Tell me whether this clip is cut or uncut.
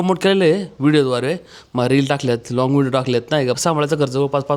cut